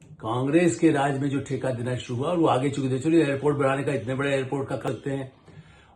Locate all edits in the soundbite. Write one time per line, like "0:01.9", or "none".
0:04.8